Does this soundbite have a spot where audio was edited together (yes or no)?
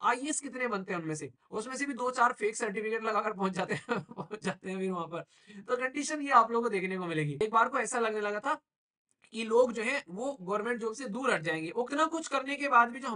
yes